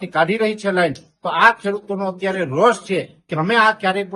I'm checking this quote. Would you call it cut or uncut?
uncut